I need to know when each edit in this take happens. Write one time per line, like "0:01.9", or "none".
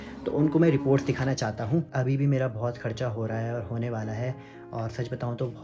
0:01.9